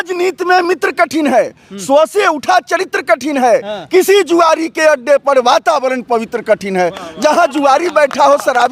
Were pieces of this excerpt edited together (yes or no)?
no